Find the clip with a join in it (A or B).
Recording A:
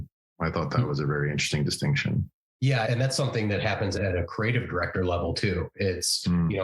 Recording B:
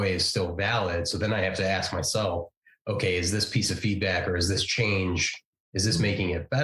A